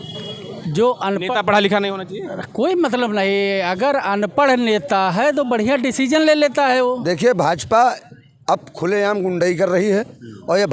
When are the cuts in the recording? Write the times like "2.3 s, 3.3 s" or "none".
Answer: 7.0 s